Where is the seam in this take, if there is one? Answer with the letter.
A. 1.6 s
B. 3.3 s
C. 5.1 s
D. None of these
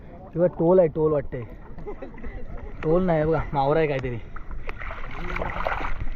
D